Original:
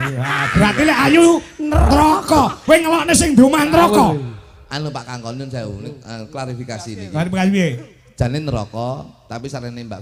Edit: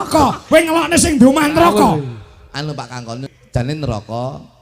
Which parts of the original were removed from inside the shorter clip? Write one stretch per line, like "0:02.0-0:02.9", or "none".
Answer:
0:05.9-0:08.3